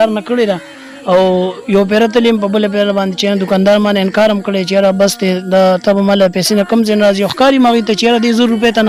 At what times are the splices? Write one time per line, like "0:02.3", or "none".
none